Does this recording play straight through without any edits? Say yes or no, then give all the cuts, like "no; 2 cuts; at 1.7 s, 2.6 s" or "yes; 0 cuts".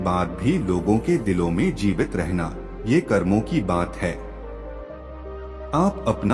yes; 0 cuts